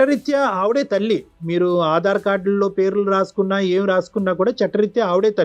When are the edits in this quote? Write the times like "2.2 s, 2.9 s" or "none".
none